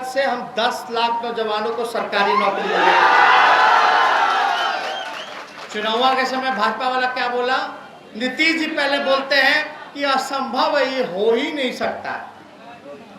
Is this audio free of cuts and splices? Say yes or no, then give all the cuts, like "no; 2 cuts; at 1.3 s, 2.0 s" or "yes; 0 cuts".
yes; 0 cuts